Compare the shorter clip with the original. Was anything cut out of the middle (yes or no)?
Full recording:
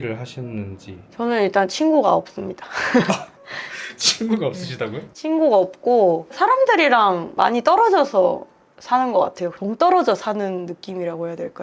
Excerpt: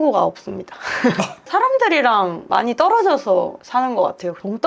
yes